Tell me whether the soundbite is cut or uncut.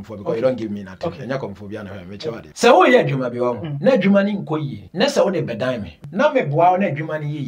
cut